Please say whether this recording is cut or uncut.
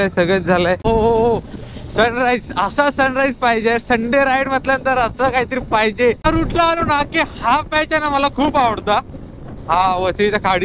cut